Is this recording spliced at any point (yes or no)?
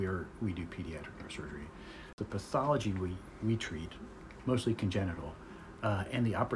yes